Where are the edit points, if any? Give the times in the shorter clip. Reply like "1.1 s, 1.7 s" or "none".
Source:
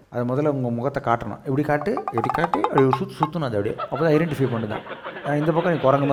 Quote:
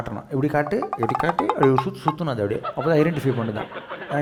none